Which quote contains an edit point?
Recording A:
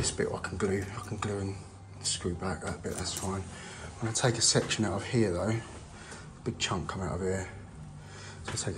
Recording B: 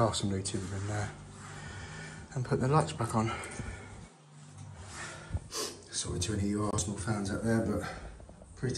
B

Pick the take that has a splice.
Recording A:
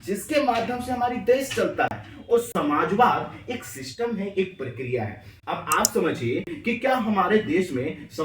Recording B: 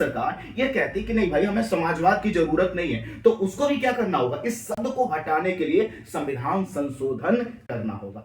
A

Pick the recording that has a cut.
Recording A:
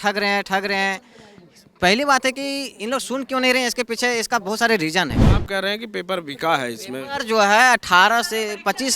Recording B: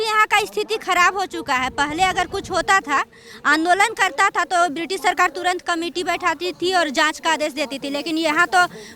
A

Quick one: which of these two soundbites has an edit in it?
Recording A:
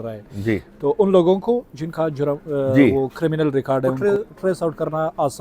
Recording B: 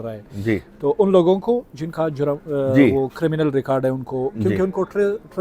A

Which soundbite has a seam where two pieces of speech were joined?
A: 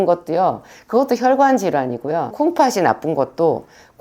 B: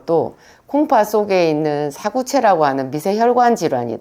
A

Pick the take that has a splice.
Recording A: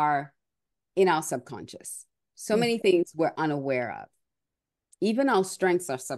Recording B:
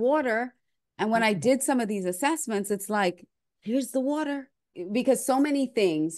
B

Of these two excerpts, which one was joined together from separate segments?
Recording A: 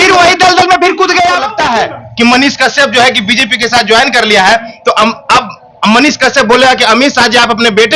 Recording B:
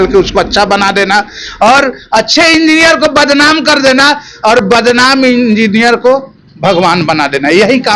A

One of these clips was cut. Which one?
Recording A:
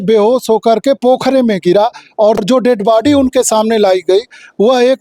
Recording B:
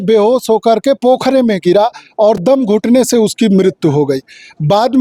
A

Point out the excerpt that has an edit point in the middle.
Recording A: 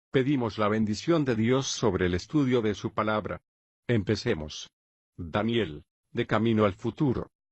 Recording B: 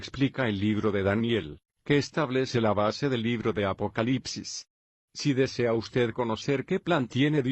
B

